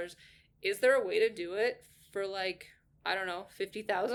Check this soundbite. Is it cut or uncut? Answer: uncut